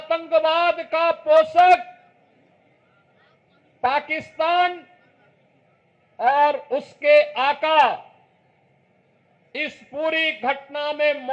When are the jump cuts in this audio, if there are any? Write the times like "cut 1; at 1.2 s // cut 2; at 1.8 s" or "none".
none